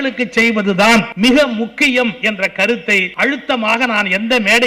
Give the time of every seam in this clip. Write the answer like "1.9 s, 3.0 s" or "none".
1.1 s, 2.7 s